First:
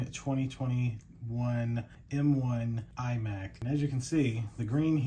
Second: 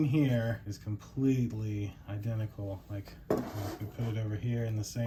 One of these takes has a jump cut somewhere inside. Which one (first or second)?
first